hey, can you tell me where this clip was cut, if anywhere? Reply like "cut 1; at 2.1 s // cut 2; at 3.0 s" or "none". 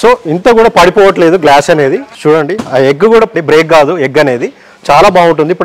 cut 1; at 2.1 s // cut 2; at 3.3 s